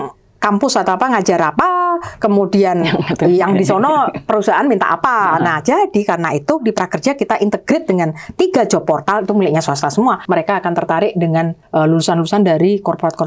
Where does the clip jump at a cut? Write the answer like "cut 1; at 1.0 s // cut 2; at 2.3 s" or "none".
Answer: cut 1; at 6.6 s // cut 2; at 10.2 s // cut 3; at 11.6 s